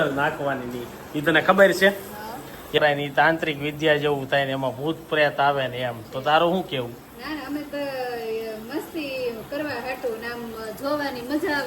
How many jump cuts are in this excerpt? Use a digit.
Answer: 1